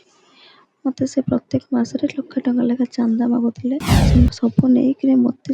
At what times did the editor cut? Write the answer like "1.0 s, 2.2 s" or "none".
3.9 s